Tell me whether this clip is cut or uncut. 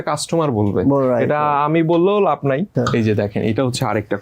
cut